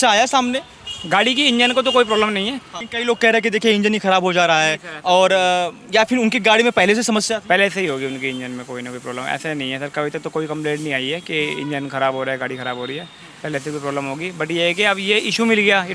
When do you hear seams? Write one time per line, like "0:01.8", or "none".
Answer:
0:02.6